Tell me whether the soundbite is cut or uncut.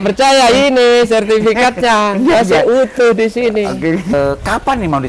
cut